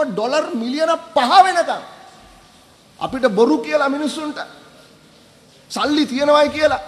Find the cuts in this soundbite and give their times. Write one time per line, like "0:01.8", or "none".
none